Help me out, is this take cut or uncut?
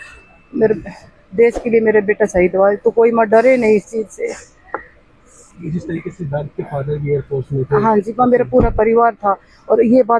uncut